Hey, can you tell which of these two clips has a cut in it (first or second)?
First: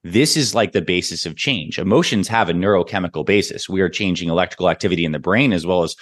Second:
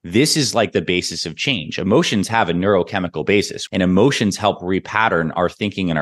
second